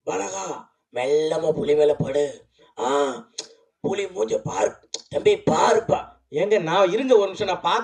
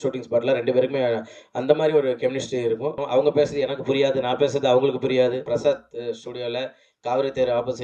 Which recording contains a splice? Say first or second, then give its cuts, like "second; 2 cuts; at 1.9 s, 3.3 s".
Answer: second; 2 cuts; at 3.0 s, 5.4 s